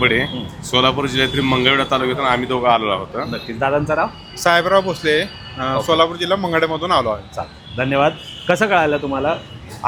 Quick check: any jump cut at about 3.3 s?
no; 0 cuts

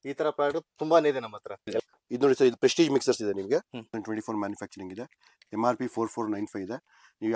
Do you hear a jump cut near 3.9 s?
yes; 2 cuts; at 1.8 s, 3.9 s

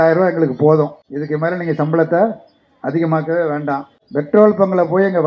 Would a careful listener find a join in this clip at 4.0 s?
yes; 2 cuts; at 1.1 s, 4.0 s

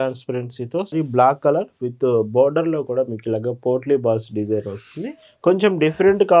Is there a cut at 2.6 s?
no; 1 cut; at 0.9 s

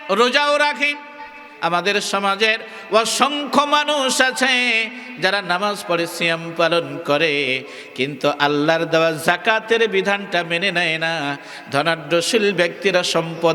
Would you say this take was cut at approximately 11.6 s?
no; 1 cut; at 1.4 s

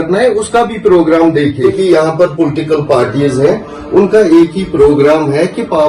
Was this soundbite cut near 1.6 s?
yes; 1 cut; at 1.6 s

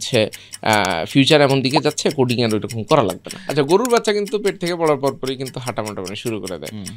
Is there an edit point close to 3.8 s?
yes; 1 cut; at 3.8 s

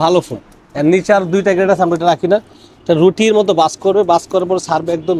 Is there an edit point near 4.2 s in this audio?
no; 0 cuts

